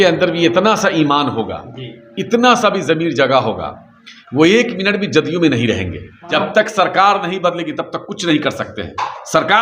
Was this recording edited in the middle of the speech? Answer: yes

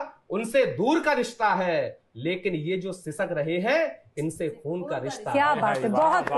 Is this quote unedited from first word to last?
yes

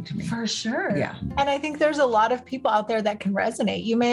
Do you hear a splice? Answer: no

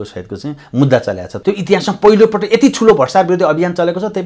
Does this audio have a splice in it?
yes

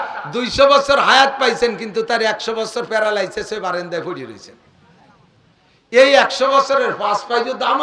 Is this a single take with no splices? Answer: yes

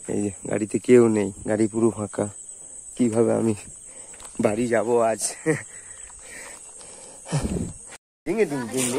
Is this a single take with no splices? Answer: no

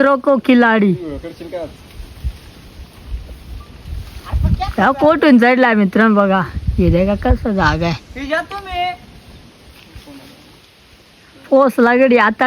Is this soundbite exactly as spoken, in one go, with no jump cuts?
yes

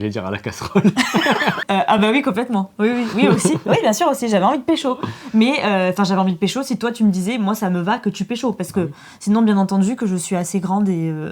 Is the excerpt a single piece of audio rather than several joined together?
yes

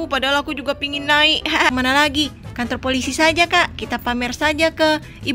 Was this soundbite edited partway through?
yes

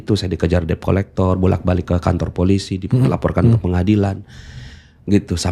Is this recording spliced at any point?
no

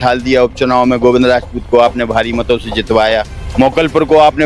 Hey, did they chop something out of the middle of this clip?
yes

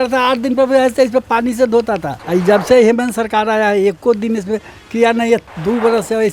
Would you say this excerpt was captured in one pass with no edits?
no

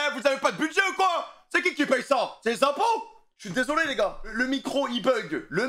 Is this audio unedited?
yes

